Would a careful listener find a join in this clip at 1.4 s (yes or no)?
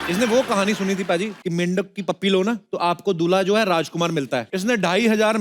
yes